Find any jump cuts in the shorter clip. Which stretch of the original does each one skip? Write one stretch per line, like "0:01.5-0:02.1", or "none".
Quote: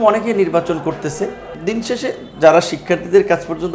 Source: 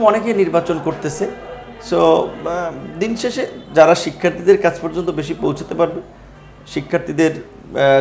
0:01.5-0:02.8